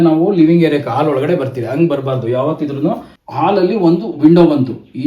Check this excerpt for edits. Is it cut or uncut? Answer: cut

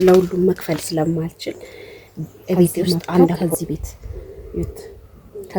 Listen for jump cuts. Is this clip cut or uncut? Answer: cut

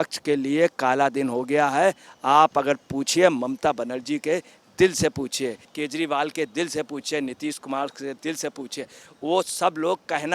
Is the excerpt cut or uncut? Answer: cut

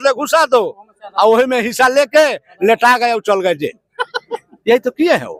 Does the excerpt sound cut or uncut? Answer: uncut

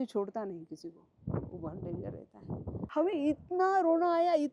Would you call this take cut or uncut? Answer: cut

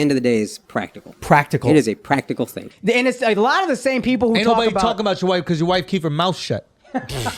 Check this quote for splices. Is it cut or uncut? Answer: cut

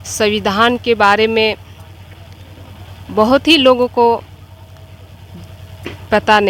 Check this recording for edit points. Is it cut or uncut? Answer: uncut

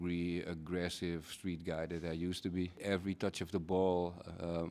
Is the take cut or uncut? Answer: cut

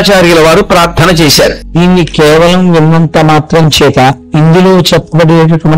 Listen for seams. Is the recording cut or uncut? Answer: cut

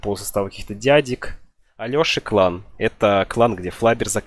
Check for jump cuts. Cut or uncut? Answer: cut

